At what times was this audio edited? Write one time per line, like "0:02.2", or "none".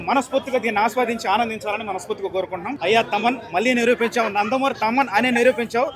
0:02.7

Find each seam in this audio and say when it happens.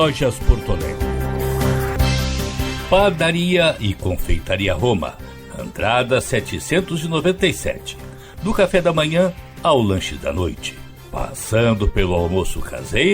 0:01.0
0:02.8

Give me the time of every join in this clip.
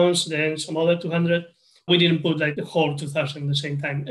0:02.5

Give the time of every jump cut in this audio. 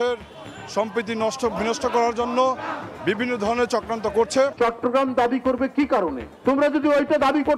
0:04.5

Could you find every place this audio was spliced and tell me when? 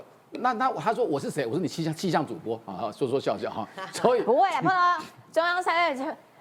none

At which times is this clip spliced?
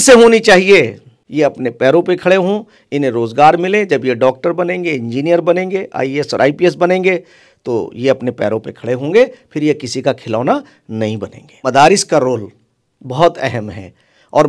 0:01.1
0:11.6

